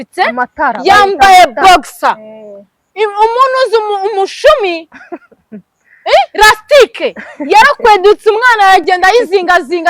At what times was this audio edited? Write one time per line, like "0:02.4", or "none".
none